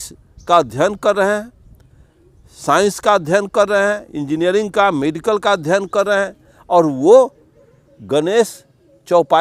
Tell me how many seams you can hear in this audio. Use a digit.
0